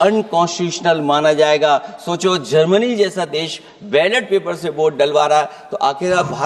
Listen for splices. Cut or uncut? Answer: uncut